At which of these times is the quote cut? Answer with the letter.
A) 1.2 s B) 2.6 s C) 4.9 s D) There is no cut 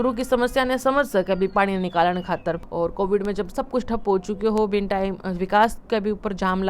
B